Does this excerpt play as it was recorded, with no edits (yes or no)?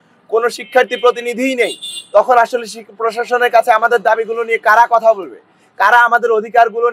yes